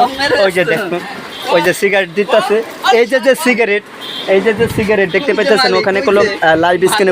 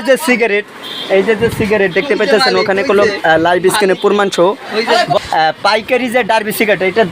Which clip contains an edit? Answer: second; 1 cut; at 5.2 s

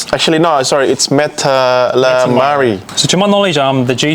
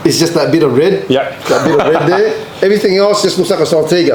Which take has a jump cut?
first; 1 cut; at 2.9 s

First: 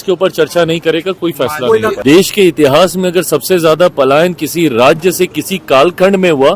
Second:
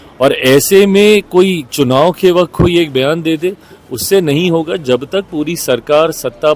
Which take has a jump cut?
first; 1 cut; at 2.0 s

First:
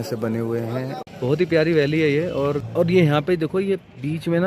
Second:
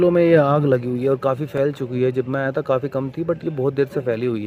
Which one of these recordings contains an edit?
first; 2 cuts; at 1.0 s, 2.6 s

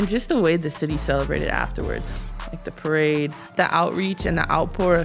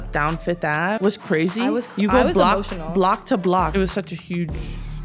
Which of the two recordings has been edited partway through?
second; 2 cuts; at 1.0 s, 3.7 s

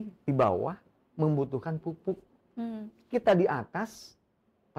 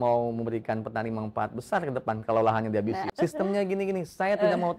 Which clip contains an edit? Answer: second; 1 cut; at 3.1 s

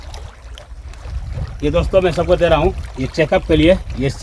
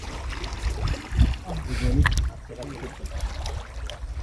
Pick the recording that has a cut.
second; 1 cut; at 1.6 s

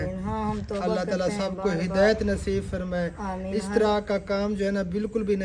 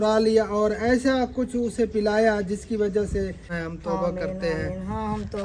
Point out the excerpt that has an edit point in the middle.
second; 1 cut; at 3.5 s

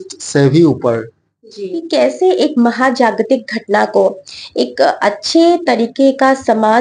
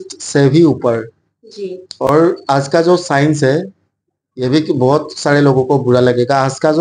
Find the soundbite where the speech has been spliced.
first; 1 cut; at 1.8 s

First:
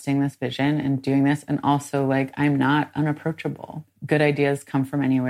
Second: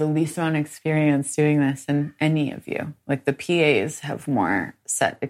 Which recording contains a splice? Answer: first; 1 cut; at 3.9 s

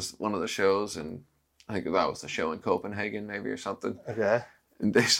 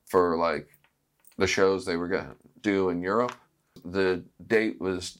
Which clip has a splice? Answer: second; 1 cut; at 3.8 s

